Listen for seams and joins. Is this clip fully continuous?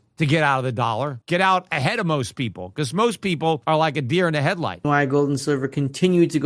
no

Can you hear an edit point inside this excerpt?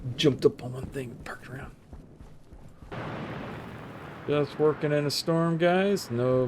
yes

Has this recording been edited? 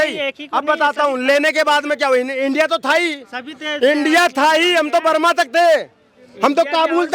no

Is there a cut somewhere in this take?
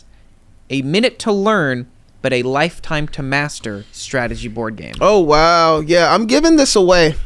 no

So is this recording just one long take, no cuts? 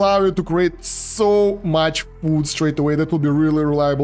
yes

